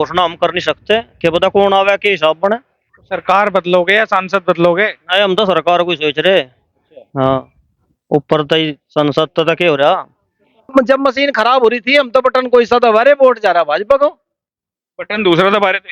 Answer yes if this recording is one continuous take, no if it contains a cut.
no